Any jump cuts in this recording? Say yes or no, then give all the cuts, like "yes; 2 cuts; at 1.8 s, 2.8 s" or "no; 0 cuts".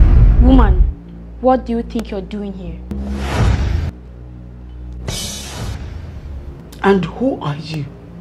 no; 0 cuts